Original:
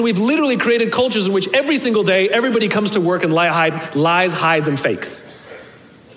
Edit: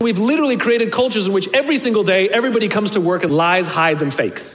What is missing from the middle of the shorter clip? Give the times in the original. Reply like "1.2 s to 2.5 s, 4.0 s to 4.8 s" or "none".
3.3 s to 3.9 s